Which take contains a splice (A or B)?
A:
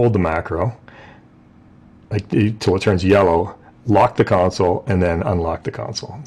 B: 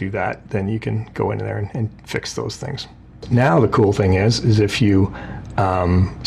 B